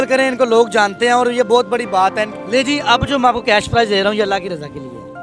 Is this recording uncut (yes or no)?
no